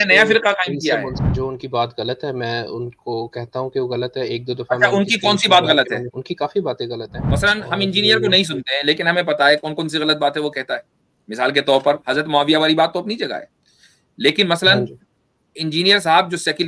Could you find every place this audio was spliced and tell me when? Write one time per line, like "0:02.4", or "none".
0:01.2
0:06.1
0:07.2